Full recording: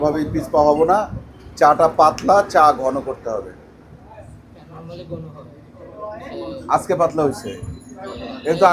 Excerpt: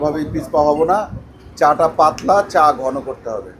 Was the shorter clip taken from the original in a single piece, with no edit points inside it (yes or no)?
yes